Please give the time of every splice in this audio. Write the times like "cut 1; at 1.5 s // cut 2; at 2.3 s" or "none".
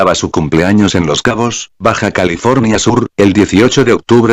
cut 1; at 1.0 s